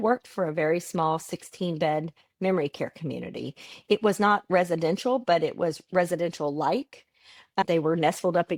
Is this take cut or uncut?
uncut